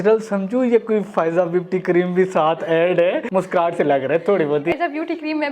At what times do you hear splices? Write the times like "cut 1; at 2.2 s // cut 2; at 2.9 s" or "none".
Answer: cut 1; at 3.2 s // cut 2; at 4.7 s